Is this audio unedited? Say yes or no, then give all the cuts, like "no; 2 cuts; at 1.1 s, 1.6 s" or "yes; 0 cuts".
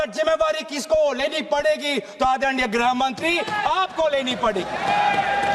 yes; 0 cuts